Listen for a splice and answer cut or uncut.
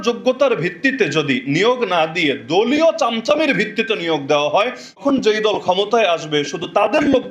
cut